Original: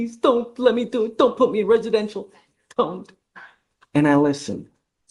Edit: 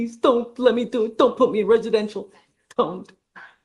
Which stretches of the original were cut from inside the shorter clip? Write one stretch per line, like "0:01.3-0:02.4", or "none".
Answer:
none